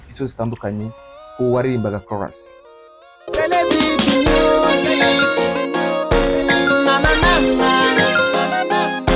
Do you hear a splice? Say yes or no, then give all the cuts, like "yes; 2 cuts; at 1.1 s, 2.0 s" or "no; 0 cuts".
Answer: yes; 1 cut; at 3.3 s